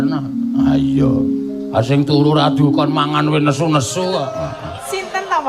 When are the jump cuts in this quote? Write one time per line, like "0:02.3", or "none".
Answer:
none